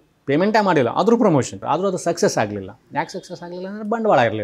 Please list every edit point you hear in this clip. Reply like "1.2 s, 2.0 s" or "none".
1.6 s